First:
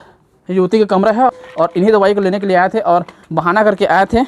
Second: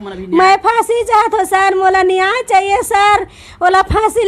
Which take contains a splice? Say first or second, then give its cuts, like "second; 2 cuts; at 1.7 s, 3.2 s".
first; 1 cut; at 1.3 s